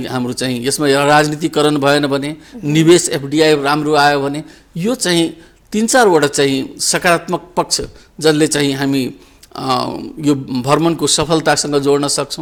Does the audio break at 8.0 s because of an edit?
no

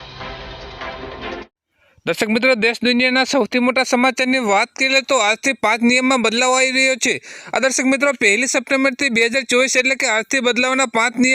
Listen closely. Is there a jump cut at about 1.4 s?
yes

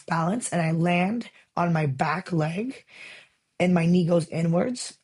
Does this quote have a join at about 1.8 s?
no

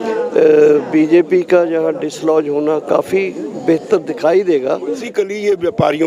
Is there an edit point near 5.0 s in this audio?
yes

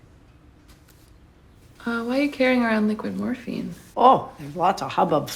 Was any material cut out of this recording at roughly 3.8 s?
yes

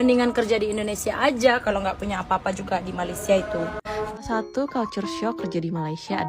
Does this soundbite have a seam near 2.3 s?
no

